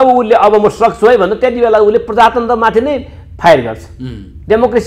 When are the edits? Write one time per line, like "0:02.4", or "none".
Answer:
none